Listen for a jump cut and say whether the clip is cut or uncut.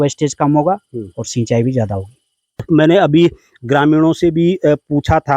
cut